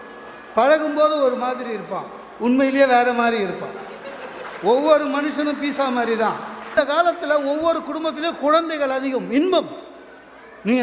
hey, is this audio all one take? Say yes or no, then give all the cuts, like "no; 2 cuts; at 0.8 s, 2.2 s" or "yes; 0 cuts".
no; 1 cut; at 6.7 s